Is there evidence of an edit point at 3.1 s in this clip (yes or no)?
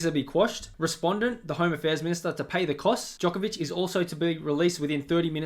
yes